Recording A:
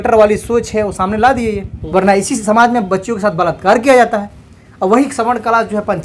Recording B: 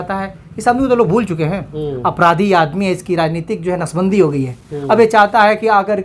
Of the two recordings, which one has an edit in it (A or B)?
A